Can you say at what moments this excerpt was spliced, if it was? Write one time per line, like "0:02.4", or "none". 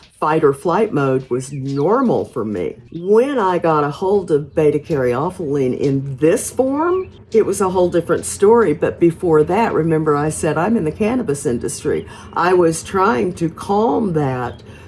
0:02.9
0:07.2